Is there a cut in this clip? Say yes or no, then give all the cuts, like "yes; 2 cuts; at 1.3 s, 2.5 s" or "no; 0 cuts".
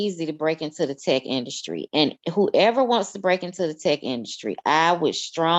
no; 0 cuts